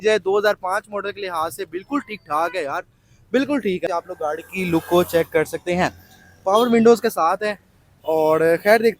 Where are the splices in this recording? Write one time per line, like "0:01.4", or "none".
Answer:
0:03.9